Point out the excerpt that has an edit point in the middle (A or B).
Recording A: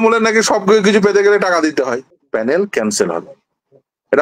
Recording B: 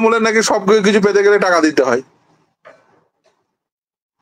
A